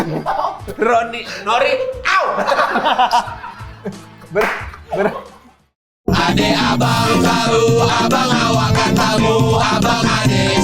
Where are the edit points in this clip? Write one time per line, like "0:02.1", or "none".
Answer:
0:05.3